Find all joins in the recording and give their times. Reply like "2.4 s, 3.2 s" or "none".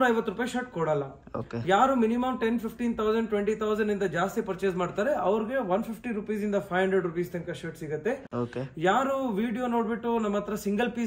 none